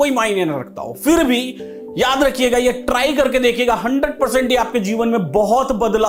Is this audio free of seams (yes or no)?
yes